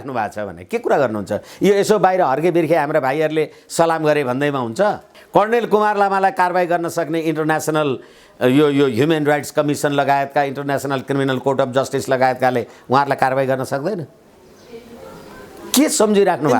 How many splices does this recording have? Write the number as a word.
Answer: one